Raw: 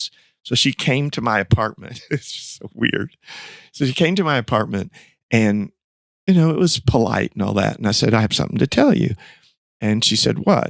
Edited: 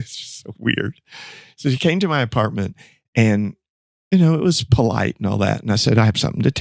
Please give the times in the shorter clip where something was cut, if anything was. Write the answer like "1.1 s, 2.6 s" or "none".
none

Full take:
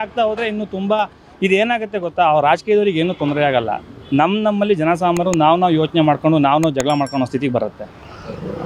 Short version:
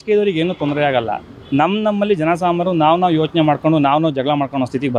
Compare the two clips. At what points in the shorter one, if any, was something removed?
none

